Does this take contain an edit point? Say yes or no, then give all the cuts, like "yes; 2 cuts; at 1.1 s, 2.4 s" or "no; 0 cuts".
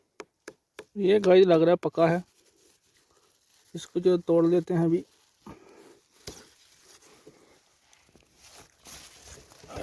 no; 0 cuts